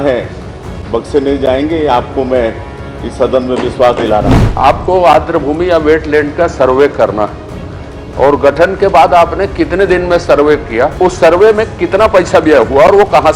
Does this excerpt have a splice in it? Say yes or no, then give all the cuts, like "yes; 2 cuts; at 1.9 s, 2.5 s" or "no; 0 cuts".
yes; 2 cuts; at 4.4 s, 10.9 s